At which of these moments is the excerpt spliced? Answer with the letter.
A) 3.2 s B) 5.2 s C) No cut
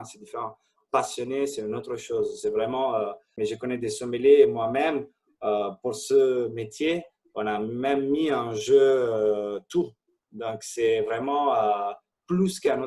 A